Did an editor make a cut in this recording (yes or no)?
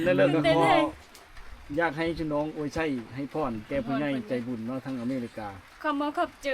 no